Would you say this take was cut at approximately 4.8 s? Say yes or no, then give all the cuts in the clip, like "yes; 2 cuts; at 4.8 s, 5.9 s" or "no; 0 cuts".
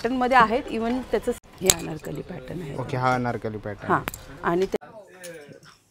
yes; 2 cuts; at 1.4 s, 4.8 s